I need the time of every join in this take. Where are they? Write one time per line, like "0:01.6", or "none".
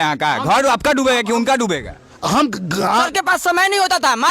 0:03.1